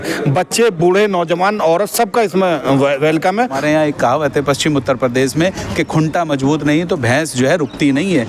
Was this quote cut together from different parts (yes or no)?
yes